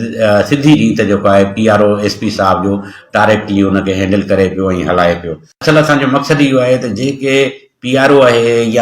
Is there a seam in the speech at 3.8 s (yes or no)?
no